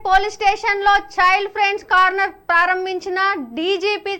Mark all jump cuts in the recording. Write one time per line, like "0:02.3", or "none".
none